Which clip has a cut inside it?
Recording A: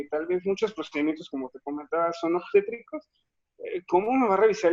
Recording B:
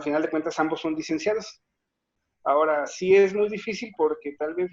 B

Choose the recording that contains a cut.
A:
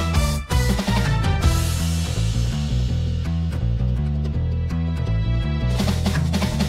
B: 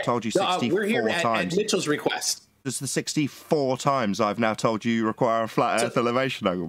B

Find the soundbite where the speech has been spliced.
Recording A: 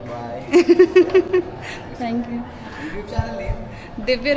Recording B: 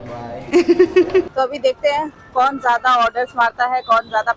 B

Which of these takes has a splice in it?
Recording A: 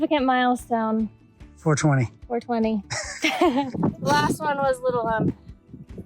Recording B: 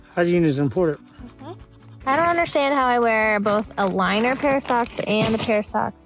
A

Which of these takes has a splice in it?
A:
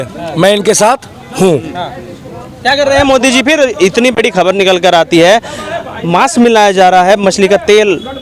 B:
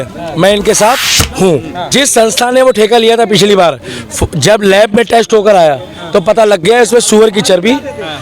B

